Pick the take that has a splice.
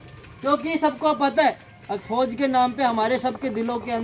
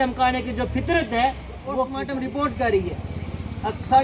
second; 1 cut; at 2.0 s

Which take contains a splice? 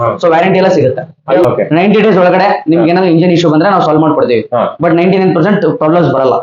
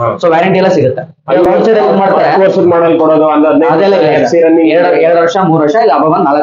first; 1 cut; at 1.5 s

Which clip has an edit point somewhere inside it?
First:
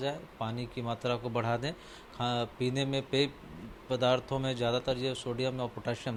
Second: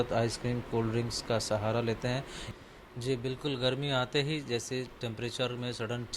second; 1 cut; at 2.4 s

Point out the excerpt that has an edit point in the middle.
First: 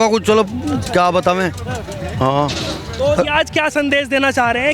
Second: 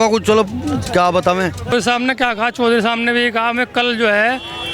second; 1 cut; at 1.7 s

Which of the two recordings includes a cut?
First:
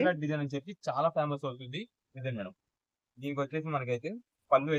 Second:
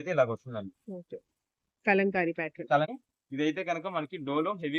second; 1 cut; at 2.9 s

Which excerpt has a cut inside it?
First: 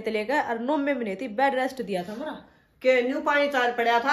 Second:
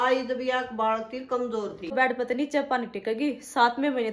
second; 1 cut; at 1.9 s

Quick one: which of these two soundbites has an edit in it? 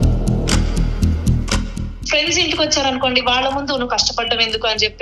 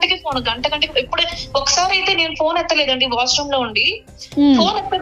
first; 1 cut; at 2.0 s

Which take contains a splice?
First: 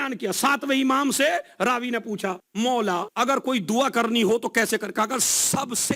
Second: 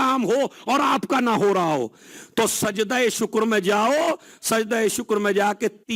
first; 2 cuts; at 2.4 s, 3.1 s

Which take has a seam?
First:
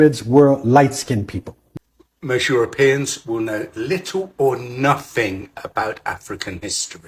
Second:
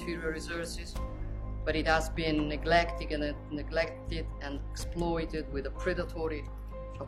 first; 1 cut; at 1.7 s

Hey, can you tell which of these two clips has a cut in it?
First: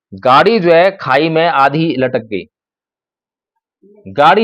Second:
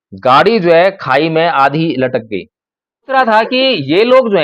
second; 1 cut; at 3.1 s

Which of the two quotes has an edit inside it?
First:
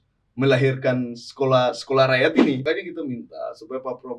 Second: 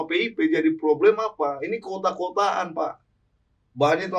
first; 1 cut; at 2.6 s

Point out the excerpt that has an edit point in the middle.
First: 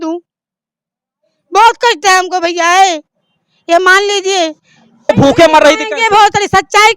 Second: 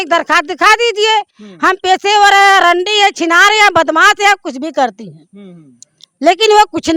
first; 1 cut; at 5.1 s

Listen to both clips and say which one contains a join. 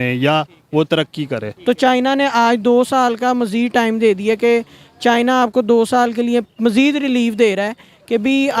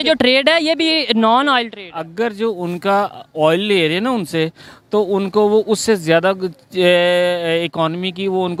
first; 1 cut; at 1.5 s

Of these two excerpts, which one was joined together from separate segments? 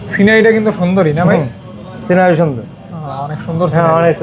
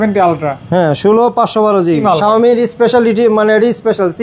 second; 1 cut; at 2.0 s

